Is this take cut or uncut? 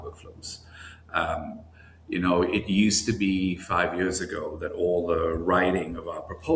uncut